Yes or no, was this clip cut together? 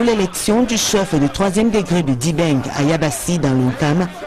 yes